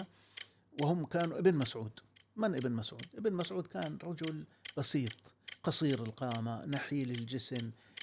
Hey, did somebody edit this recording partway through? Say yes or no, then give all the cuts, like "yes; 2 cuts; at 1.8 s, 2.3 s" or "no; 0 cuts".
no; 0 cuts